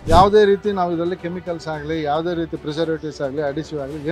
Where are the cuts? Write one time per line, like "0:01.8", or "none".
none